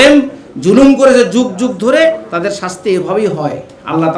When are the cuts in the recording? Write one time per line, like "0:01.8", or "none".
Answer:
none